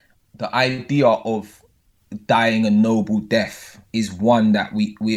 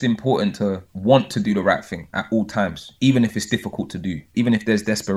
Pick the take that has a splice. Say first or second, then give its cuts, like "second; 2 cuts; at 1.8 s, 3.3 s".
second; 2 cuts; at 0.9 s, 4.3 s